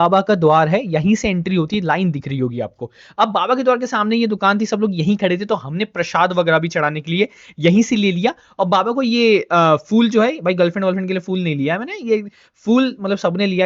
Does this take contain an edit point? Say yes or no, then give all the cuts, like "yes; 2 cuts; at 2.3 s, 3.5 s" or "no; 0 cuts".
no; 0 cuts